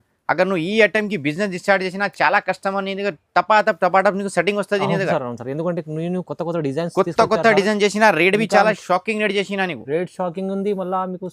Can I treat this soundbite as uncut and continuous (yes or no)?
yes